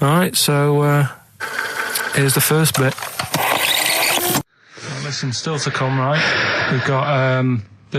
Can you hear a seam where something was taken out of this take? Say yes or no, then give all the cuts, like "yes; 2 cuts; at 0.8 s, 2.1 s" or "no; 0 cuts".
yes; 1 cut; at 4.5 s